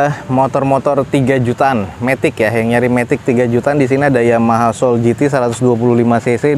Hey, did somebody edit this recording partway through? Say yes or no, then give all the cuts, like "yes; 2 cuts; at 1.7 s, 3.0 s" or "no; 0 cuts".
no; 0 cuts